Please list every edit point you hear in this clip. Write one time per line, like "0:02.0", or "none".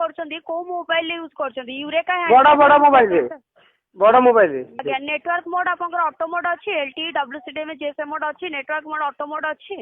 0:04.8

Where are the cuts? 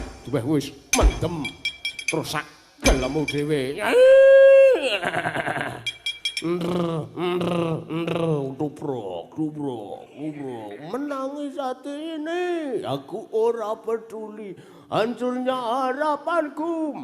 0:06.6

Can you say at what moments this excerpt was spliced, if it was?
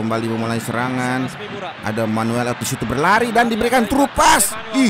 none

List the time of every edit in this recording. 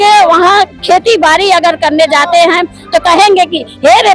none

